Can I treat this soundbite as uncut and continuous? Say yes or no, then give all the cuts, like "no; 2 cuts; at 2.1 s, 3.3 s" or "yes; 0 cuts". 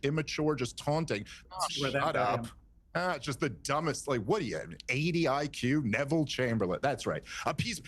no; 1 cut; at 1.4 s